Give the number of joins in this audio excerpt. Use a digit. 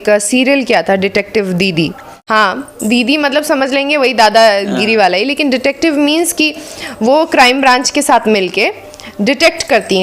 1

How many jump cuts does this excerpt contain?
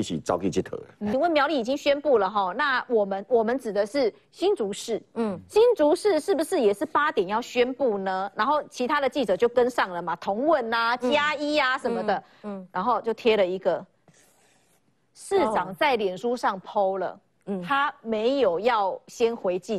1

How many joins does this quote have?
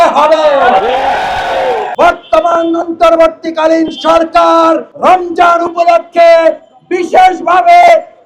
1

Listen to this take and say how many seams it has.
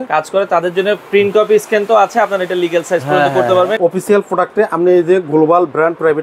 1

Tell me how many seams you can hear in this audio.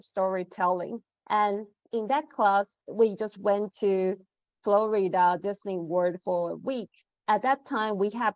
1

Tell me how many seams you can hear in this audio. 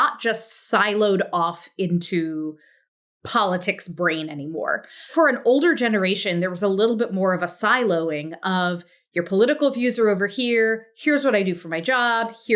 1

